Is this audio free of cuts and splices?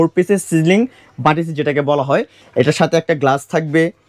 no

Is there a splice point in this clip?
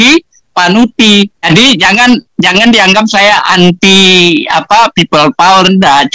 yes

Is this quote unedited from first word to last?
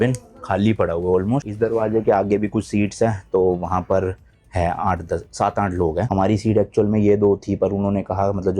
yes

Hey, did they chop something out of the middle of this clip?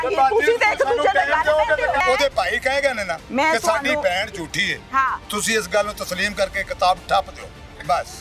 yes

